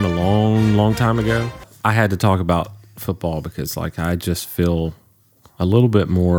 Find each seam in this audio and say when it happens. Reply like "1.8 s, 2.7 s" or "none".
1.7 s